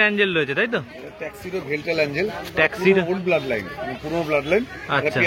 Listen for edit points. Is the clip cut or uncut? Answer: uncut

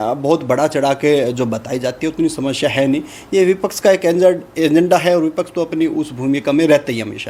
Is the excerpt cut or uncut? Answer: uncut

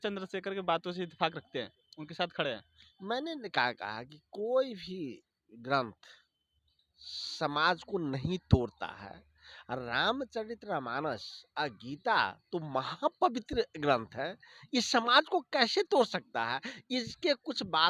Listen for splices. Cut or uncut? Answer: uncut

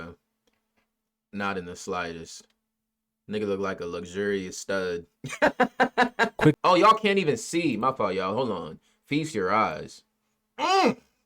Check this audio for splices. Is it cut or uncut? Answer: cut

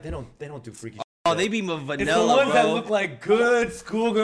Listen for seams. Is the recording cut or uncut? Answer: cut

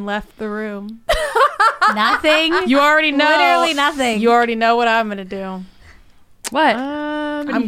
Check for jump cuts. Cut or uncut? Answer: uncut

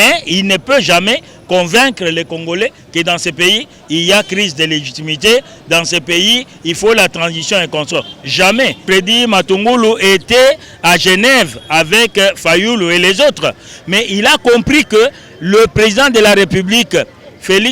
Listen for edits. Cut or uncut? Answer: cut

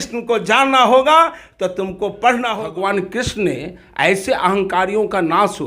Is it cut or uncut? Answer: cut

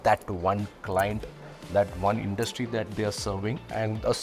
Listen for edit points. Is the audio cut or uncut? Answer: uncut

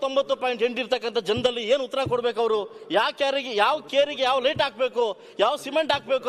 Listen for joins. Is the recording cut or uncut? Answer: uncut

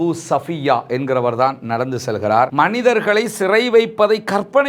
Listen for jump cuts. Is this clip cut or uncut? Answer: cut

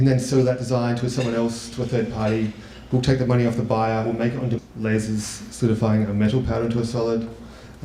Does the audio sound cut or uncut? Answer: uncut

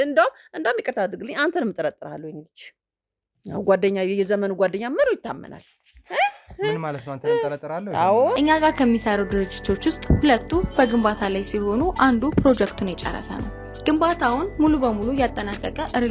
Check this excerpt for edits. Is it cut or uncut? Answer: cut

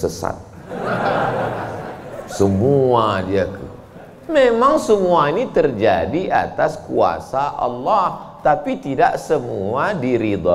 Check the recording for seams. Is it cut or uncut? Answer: uncut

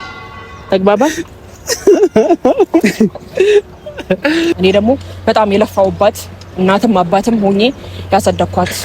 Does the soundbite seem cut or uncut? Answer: cut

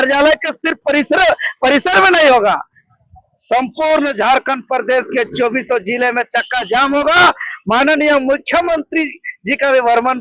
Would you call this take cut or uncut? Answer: uncut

